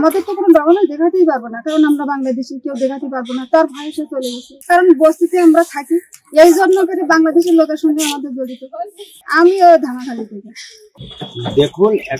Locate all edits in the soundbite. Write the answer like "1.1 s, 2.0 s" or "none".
none